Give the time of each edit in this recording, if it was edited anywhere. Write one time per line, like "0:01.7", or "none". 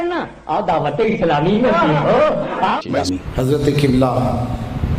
0:02.8